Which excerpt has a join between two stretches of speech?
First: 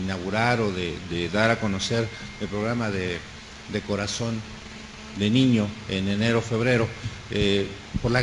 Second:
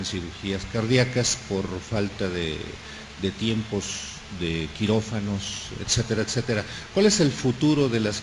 second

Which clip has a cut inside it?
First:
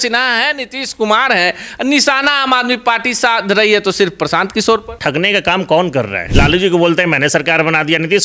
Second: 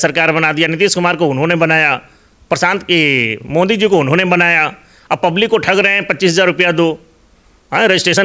first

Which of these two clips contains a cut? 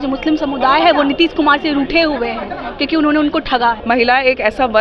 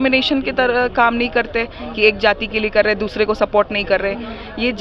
first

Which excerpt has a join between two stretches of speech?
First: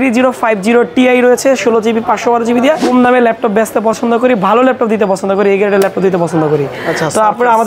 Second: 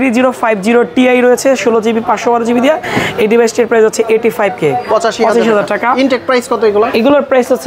first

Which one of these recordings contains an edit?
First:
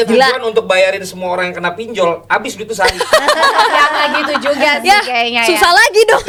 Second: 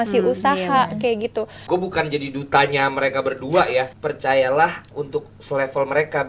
second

